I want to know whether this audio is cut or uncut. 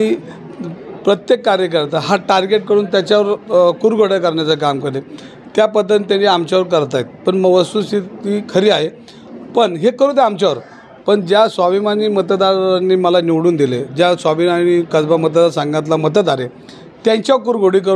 uncut